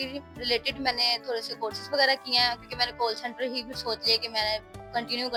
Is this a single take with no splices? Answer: yes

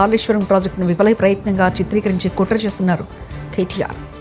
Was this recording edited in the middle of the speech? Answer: no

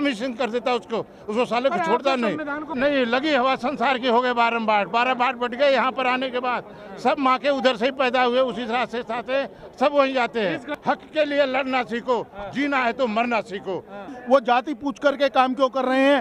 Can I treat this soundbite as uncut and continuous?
no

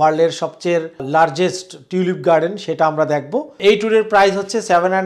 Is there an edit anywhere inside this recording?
yes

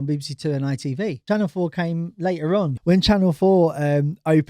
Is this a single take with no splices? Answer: no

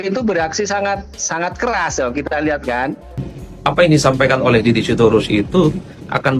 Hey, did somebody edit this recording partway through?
yes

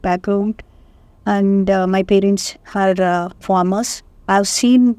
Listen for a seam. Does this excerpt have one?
no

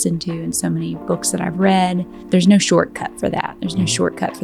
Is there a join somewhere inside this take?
yes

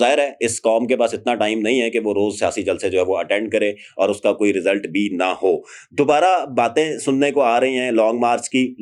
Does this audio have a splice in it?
no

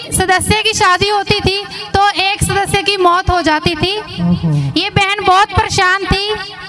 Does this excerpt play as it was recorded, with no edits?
yes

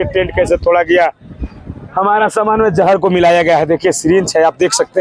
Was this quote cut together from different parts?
no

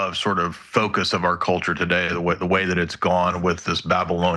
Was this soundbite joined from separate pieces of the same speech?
no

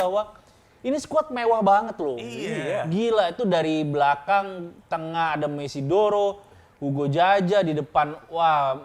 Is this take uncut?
yes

